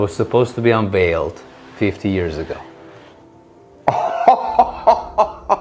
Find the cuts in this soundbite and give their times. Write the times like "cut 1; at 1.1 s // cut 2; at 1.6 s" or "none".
none

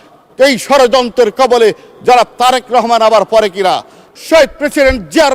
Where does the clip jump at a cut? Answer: cut 1; at 4.0 s

